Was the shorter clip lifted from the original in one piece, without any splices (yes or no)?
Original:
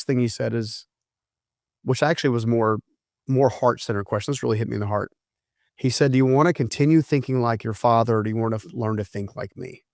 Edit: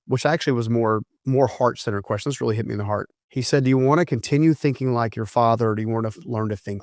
no